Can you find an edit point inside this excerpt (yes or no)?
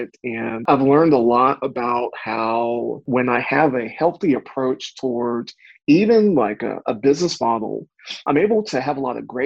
no